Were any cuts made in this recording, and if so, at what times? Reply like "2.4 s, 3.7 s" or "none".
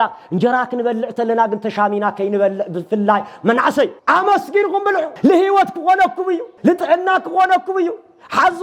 4.0 s, 5.1 s, 6.5 s